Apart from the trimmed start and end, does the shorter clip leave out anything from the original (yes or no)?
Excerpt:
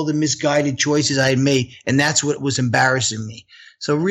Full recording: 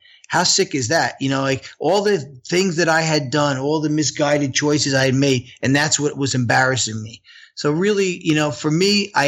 no